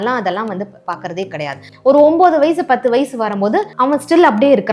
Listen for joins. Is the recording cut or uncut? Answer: cut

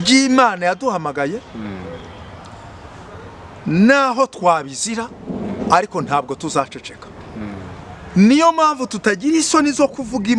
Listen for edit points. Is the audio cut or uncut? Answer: uncut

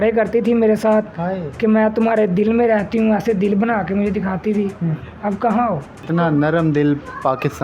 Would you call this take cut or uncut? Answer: cut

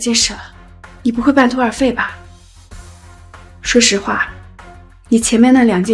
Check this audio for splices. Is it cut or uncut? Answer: cut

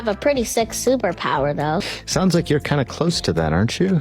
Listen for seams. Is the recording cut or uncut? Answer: cut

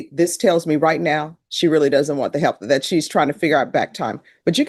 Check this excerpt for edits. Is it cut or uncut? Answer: uncut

